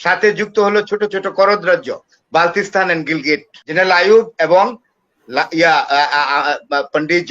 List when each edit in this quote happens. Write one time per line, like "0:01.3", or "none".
0:03.6